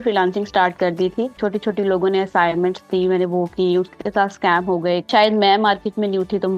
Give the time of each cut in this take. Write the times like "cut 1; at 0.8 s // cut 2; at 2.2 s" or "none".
cut 1; at 1.3 s // cut 2; at 5.1 s